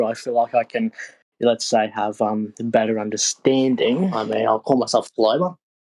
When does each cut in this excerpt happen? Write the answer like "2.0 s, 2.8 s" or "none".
4.2 s